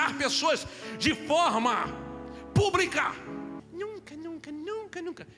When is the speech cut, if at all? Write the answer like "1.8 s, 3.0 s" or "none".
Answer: 3.6 s